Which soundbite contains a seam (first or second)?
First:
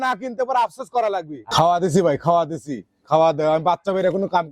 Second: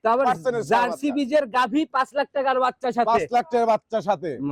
first